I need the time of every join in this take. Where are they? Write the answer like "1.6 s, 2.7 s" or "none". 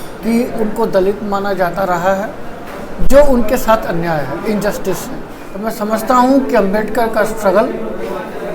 5.5 s